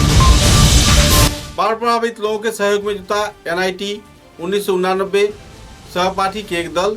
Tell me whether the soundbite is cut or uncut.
cut